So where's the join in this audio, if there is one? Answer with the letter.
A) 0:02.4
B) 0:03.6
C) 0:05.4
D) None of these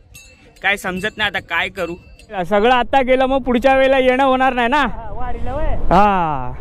A